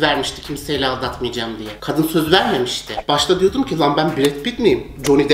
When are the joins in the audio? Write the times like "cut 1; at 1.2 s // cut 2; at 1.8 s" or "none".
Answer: cut 1; at 1.7 s // cut 2; at 2.9 s